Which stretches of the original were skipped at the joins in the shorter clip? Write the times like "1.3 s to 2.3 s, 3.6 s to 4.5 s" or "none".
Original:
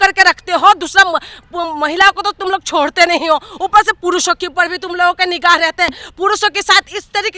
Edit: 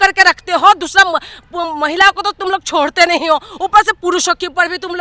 none